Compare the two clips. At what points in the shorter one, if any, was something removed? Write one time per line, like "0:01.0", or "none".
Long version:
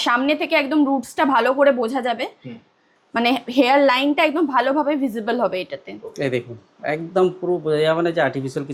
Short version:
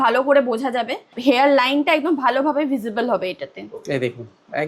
0:01.1